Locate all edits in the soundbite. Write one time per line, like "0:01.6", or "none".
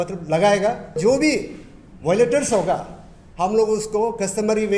0:01.0